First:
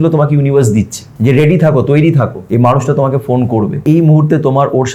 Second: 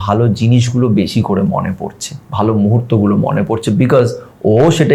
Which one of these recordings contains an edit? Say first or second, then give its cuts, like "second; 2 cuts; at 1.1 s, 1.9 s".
first; 3 cuts; at 1.0 s, 2.4 s, 3.8 s